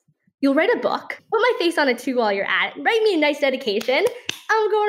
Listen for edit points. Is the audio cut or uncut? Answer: cut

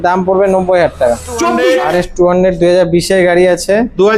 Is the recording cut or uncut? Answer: cut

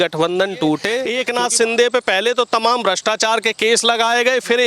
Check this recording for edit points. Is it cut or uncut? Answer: cut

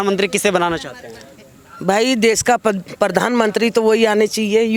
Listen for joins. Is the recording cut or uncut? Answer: uncut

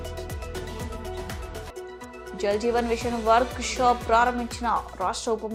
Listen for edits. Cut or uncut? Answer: uncut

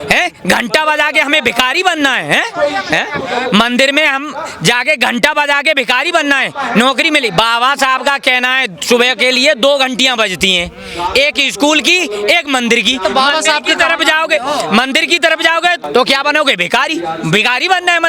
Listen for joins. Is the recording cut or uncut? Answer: uncut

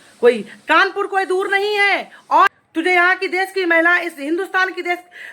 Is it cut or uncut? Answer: cut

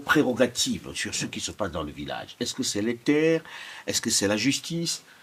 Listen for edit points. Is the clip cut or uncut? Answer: uncut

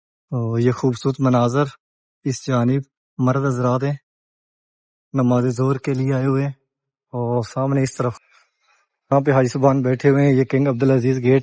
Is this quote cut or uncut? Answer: cut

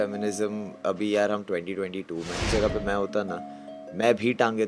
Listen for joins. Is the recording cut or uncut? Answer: cut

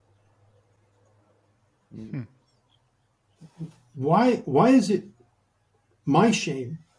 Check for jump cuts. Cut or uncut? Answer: uncut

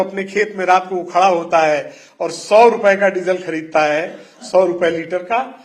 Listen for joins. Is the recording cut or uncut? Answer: uncut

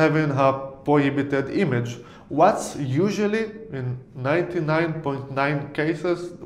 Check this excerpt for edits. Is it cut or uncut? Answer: uncut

